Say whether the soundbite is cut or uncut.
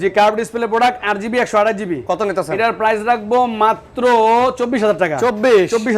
uncut